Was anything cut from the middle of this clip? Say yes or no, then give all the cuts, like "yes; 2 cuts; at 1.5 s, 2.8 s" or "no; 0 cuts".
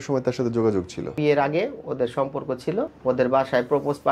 yes; 2 cuts; at 1.2 s, 2.9 s